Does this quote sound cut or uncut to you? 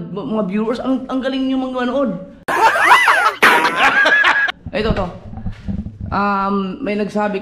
uncut